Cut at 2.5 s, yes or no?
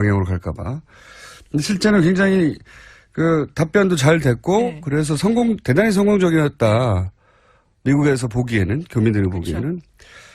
no